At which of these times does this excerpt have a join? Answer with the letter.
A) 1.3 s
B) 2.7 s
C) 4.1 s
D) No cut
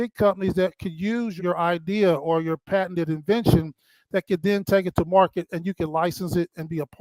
A